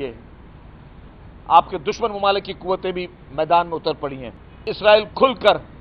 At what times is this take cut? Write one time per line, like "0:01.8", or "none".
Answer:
0:04.7

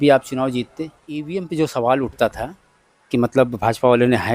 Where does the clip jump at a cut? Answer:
0:01.2

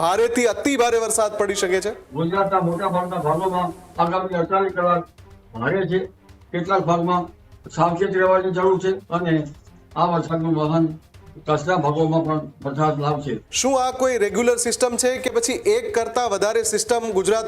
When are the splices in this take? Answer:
0:02.0
0:09.0
0:13.4

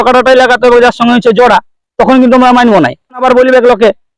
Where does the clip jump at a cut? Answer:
0:03.2

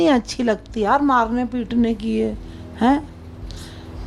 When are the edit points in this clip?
none

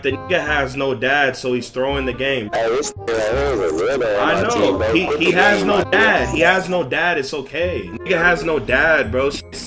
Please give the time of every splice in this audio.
0:02.5
0:08.1

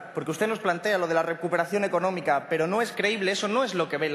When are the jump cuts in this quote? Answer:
0:01.7

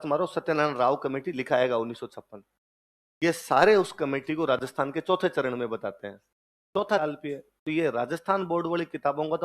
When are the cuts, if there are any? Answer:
0:07.0

